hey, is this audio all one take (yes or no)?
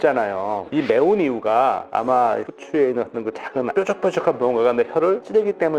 yes